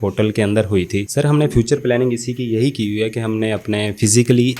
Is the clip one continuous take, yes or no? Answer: no